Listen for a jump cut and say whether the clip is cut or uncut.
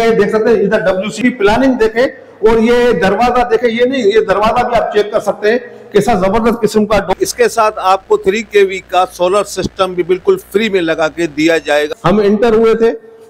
cut